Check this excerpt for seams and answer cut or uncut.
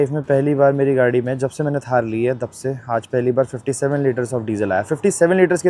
uncut